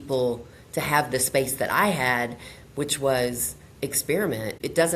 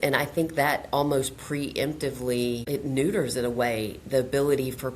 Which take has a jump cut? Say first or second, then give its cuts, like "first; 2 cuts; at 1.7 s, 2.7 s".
second; 1 cut; at 2.6 s